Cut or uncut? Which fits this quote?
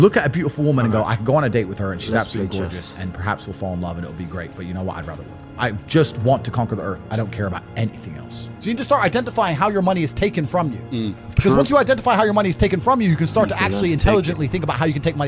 cut